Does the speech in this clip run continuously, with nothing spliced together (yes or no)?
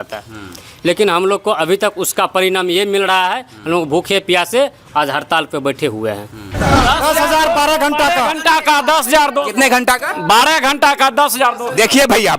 no